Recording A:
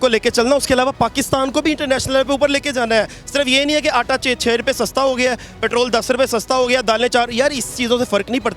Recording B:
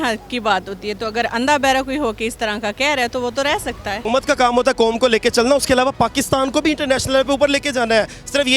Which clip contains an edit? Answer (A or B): B